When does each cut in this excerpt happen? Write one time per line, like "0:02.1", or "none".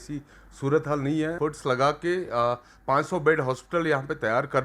0:01.4